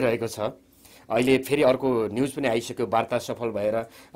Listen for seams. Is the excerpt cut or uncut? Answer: uncut